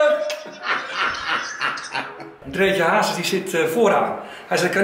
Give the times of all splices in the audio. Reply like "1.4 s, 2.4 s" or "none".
2.4 s

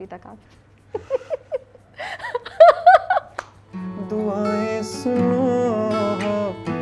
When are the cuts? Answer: 3.9 s

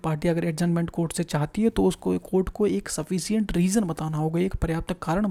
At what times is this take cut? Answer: none

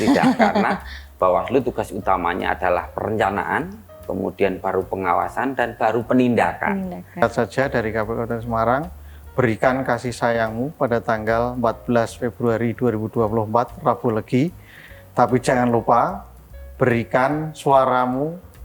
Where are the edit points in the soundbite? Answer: 7.2 s

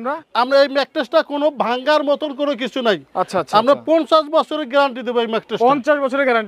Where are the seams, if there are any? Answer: none

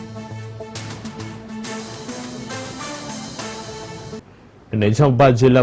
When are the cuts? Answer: 4.2 s

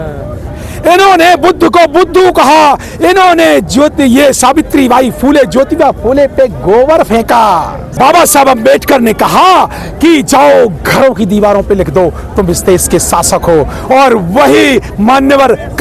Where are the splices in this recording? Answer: 7.8 s

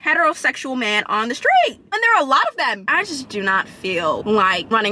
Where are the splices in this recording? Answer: 1.9 s, 2.8 s

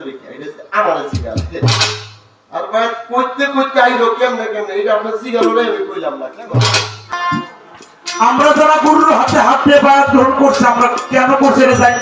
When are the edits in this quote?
7.1 s

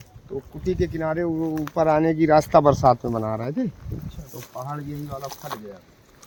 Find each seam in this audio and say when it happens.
none

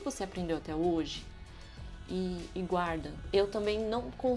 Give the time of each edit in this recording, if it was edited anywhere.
3.2 s

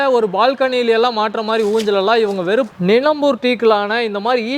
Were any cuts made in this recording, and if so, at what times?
2.7 s

